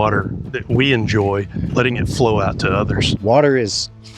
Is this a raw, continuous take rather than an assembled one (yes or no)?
no